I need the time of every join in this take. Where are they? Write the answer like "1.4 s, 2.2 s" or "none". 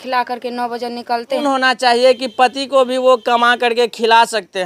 1.4 s

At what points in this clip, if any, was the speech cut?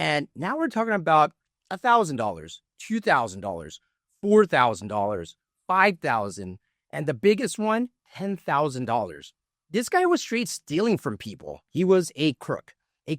11.6 s

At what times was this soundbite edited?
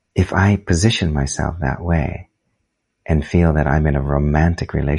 none

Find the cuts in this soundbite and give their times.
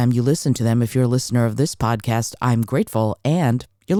none

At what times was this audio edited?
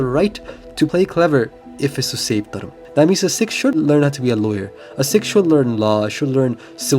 0.9 s, 1.7 s, 2.8 s, 3.7 s

